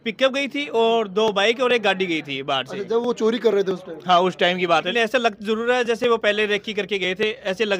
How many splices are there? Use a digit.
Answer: 1